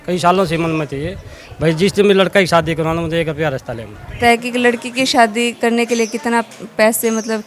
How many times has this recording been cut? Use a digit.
2